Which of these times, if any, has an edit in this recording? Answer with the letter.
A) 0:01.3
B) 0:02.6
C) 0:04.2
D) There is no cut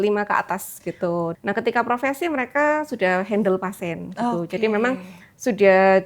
A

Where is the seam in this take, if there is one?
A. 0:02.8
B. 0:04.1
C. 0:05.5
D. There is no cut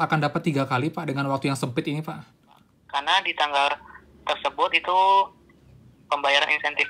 A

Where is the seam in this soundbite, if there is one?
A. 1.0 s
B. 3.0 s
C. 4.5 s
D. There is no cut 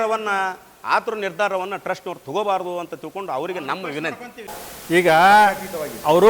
C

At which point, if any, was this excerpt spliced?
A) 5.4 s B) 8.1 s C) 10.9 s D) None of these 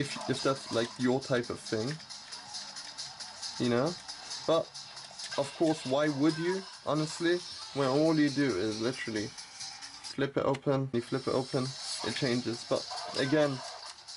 C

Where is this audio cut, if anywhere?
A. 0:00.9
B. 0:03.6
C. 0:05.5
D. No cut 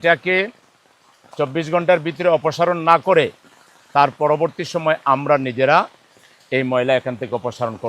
D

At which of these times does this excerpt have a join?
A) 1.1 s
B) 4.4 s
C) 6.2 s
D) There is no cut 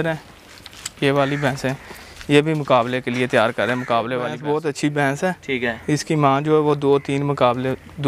B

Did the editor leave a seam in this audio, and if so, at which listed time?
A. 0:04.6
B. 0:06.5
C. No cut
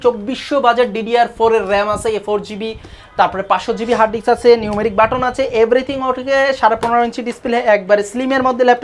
C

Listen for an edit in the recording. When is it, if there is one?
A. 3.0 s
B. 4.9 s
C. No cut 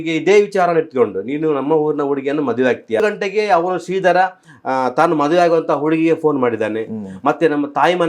A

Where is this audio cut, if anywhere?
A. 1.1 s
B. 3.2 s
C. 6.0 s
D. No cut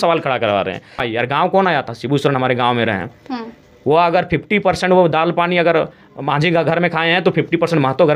A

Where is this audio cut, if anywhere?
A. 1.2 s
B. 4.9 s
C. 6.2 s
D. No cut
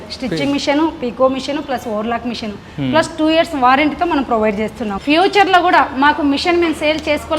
B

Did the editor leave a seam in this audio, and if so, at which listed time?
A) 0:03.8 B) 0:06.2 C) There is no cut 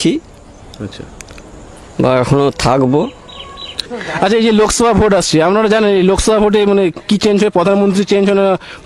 A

